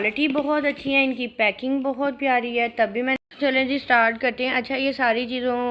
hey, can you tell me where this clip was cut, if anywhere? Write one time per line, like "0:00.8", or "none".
0:03.2